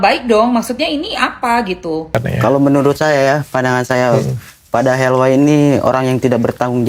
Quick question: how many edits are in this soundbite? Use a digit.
1